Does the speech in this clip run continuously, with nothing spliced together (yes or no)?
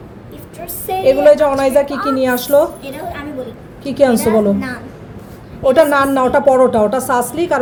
yes